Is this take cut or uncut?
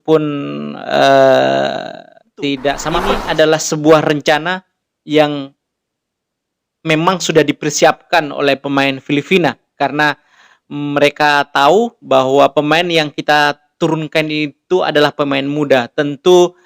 cut